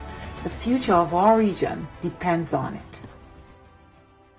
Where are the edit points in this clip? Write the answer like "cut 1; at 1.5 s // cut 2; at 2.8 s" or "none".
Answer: cut 1; at 2.8 s